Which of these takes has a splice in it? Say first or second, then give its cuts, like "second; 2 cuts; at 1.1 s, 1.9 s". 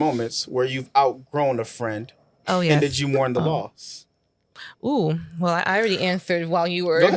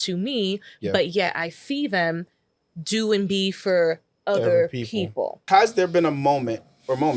second; 1 cut; at 5.4 s